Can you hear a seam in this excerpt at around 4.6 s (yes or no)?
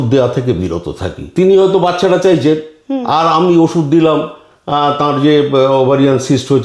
no